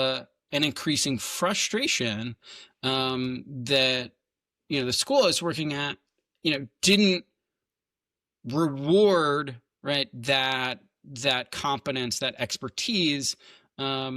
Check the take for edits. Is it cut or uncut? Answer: uncut